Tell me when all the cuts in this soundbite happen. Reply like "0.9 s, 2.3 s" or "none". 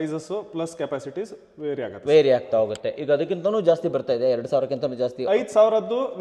none